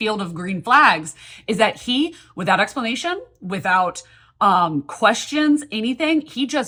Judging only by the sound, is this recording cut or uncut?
uncut